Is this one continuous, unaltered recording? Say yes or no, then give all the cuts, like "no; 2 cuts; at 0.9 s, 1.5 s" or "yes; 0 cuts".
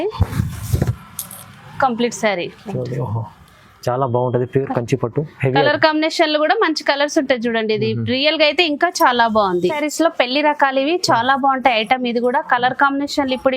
no; 1 cut; at 9.8 s